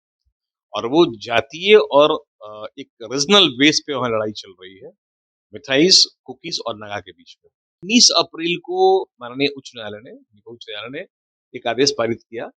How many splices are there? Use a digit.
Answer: 1